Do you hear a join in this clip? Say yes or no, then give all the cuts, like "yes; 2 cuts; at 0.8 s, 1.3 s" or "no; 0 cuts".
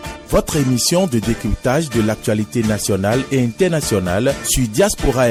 no; 0 cuts